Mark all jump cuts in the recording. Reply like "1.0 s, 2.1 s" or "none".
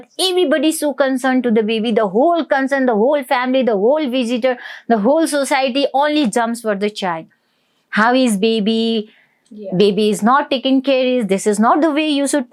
none

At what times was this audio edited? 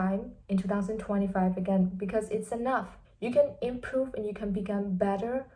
3.1 s

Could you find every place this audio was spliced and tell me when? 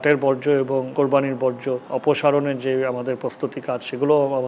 0.9 s, 1.8 s

